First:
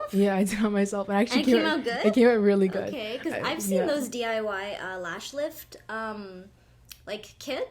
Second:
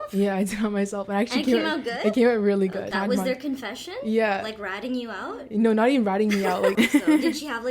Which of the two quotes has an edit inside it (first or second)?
second